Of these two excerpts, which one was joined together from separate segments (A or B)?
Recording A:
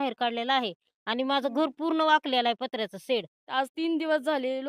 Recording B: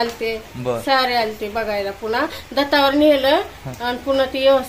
A